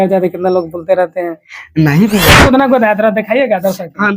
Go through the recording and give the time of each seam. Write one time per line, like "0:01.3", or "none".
0:02.4